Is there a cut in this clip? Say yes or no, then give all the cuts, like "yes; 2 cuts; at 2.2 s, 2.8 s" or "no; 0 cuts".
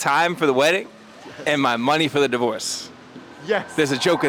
no; 0 cuts